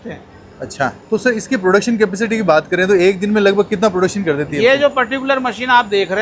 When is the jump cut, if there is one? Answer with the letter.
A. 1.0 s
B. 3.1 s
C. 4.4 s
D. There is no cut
A